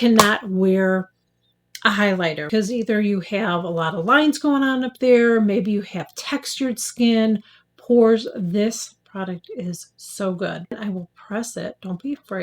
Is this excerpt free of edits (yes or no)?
no